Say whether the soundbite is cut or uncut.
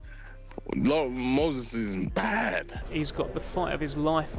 cut